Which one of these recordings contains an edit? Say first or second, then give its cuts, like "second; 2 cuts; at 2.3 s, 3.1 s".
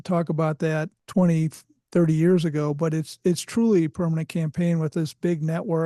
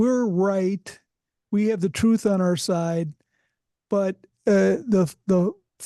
first; 1 cut; at 1.0 s